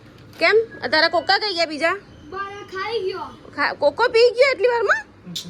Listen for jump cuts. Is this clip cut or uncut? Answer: uncut